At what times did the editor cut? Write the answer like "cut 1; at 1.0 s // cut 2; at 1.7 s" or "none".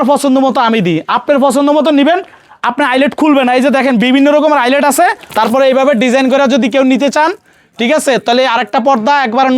cut 1; at 5.2 s